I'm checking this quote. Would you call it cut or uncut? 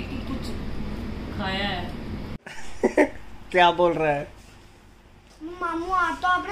cut